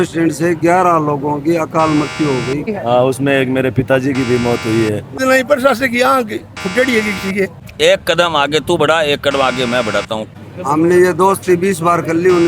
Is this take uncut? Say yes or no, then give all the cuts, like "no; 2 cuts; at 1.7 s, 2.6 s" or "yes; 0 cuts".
no; 4 cuts; at 2.7 s, 5.1 s, 7.6 s, 10.3 s